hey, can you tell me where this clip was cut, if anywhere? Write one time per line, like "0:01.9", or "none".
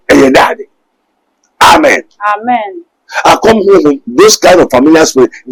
none